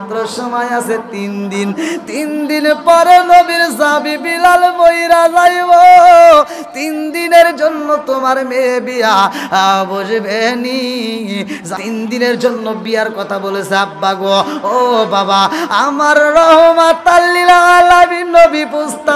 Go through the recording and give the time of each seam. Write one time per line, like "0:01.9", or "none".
0:11.7

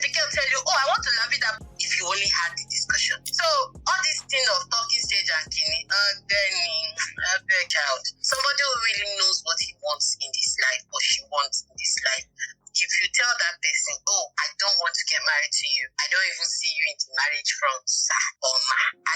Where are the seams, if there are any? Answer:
0:01.5
0:07.7

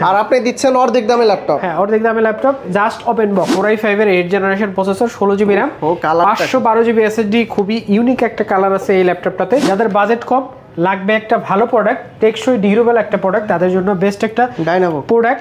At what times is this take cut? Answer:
0:03.6
0:09.6

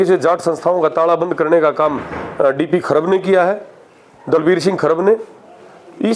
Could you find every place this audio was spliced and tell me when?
none

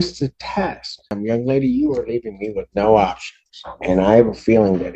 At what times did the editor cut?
0:01.2

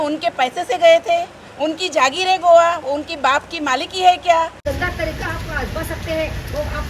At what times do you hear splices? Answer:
0:04.6

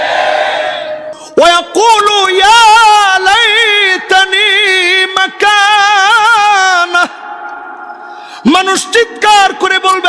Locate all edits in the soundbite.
0:01.1

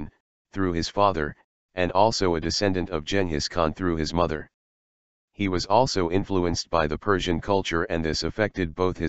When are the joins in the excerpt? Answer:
0:07.7

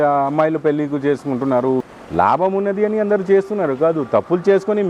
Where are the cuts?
0:01.8

